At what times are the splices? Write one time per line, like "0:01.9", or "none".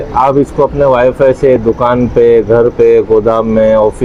none